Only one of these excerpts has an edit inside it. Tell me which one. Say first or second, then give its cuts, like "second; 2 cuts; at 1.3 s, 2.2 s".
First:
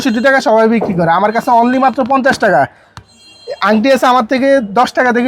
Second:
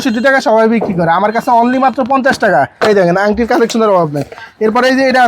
second; 1 cut; at 2.7 s